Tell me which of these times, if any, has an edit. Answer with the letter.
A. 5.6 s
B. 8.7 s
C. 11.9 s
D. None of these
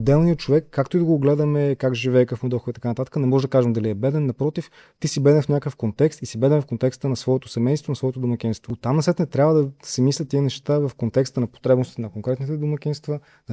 B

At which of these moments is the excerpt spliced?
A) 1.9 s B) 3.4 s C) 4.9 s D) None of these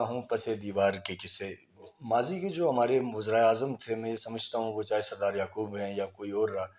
A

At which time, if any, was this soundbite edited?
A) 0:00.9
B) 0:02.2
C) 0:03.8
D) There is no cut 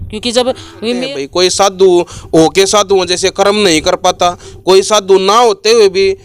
A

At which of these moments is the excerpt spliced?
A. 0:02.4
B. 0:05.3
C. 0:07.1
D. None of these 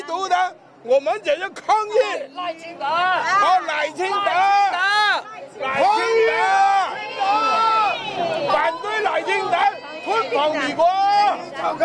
D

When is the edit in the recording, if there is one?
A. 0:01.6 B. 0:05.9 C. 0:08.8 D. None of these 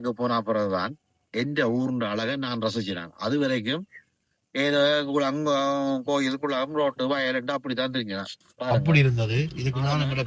C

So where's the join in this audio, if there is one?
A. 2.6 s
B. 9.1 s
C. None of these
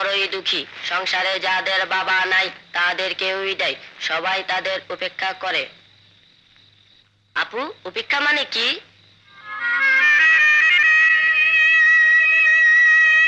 C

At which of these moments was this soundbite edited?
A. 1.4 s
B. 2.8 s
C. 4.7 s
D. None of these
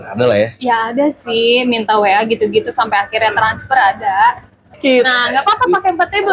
C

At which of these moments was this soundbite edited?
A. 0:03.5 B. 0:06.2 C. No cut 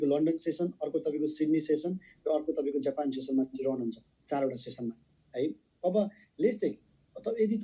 C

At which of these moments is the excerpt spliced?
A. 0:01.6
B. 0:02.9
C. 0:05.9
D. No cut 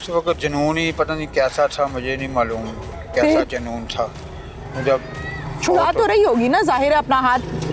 D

